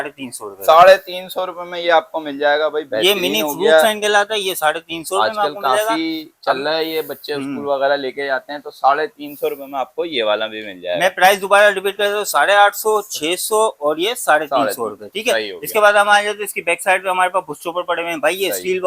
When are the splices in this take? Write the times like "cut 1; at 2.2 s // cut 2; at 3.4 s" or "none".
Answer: none